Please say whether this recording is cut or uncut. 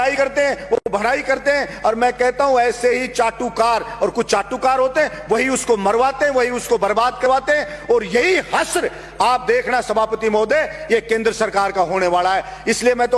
uncut